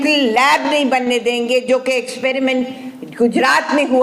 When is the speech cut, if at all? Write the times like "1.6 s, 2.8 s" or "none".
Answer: none